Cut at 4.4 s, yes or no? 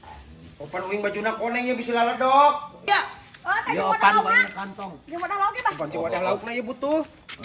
no